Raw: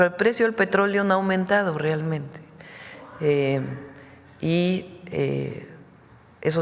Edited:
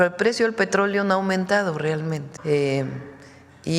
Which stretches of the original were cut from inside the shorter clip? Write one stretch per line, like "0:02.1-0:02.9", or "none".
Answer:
0:02.3-0:03.1